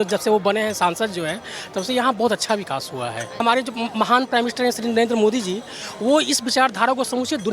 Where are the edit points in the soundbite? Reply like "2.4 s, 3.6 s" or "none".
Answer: 3.4 s